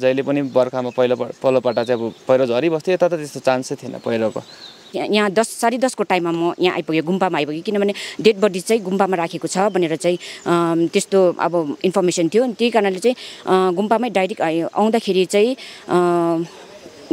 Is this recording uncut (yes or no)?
no